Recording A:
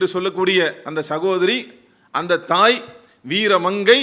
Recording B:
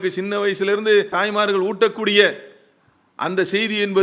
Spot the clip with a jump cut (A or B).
B